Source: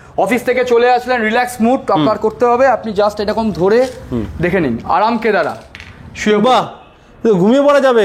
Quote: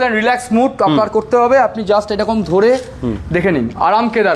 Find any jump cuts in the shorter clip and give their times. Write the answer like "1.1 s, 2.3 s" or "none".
none